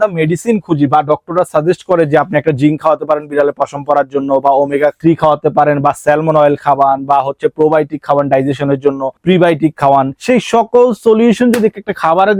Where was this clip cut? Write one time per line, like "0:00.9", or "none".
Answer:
none